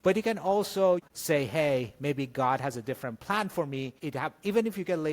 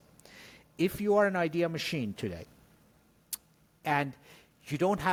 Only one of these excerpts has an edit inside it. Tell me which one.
first; 2 cuts; at 1.0 s, 4.0 s

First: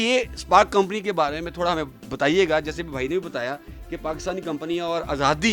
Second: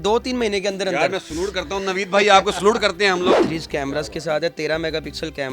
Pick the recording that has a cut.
second; 1 cut; at 3.5 s

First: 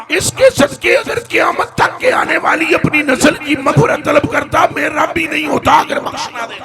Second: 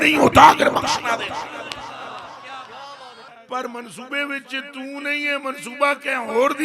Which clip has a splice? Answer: second; 1 cut; at 3.3 s

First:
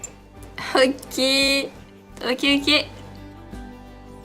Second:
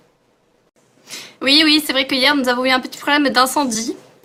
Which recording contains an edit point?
first; 1 cut; at 2.6 s

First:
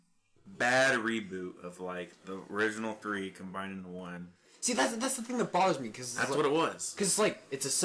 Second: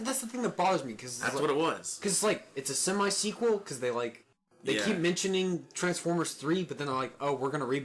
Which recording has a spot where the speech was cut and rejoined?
second; 1 cut; at 5.5 s

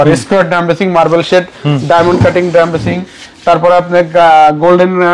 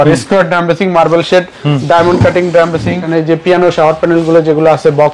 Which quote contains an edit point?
second; 1 cut; at 3.0 s

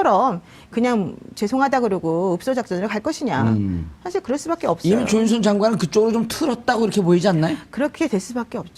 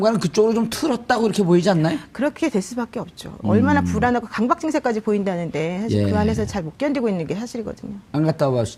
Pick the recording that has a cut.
first; 1 cut; at 3.7 s

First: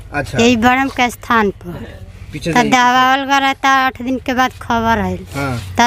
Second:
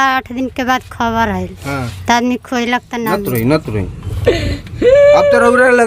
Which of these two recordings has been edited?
second; 1 cut; at 3.1 s

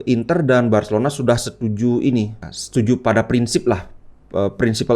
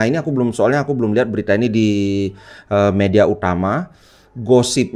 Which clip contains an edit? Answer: first; 1 cut; at 2.5 s

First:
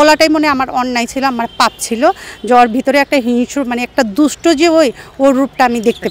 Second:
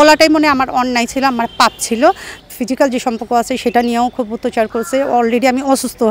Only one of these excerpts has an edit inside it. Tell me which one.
second; 1 cut; at 2.3 s

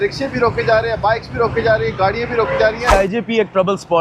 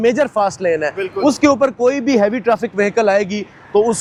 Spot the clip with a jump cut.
first; 1 cut; at 2.9 s

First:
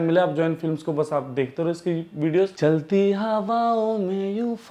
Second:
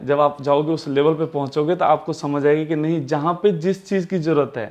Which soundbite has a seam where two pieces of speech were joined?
first; 1 cut; at 2.5 s

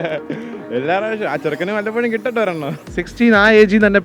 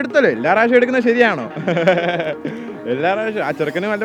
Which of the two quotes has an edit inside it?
first; 1 cut; at 2.8 s

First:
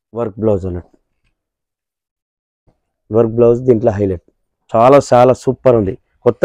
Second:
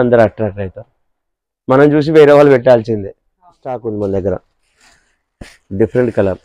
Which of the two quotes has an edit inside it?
second; 1 cut; at 3.6 s

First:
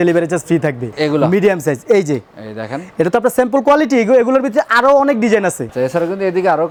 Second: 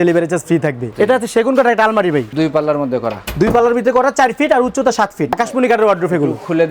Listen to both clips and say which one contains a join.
second; 3 cuts; at 0.9 s, 2.3 s, 5.3 s

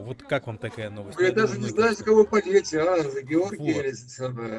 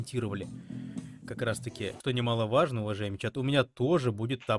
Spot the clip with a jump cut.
second; 1 cut; at 1.9 s

